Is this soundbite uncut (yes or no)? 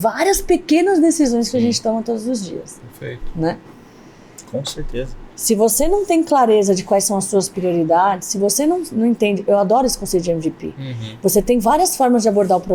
yes